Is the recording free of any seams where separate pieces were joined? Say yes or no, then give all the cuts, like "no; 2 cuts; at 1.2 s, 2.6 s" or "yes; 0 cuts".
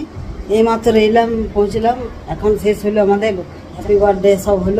no; 1 cut; at 3.7 s